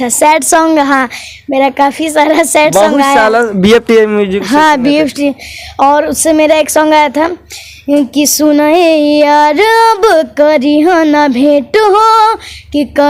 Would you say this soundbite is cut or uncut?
uncut